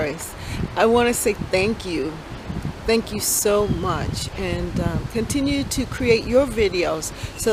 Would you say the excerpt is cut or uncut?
uncut